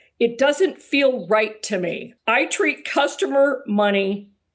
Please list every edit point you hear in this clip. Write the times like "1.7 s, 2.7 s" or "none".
2.1 s